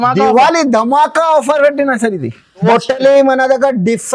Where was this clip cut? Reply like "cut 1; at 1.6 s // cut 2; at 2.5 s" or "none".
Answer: cut 1; at 2.6 s